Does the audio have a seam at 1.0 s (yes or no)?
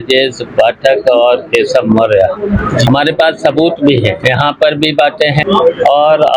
no